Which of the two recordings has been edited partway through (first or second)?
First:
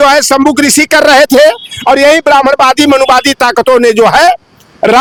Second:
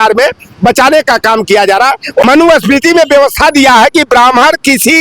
second